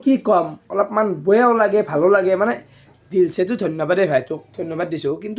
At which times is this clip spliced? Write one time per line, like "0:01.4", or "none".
none